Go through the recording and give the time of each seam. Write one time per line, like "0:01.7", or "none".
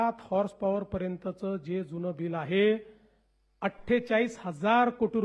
none

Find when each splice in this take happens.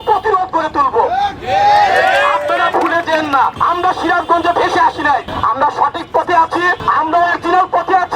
0:03.6
0:05.3
0:06.8

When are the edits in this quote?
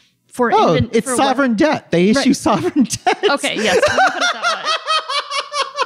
none

